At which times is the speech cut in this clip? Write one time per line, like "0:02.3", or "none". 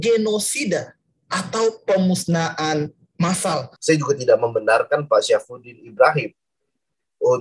0:03.7